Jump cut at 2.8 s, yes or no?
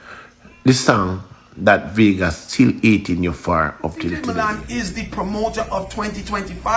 no